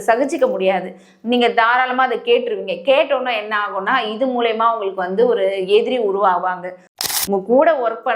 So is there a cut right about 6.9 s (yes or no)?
yes